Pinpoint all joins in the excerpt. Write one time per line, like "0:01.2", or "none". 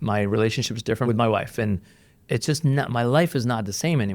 0:01.1